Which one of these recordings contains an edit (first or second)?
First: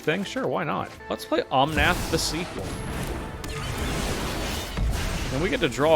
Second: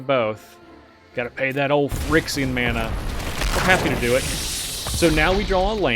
first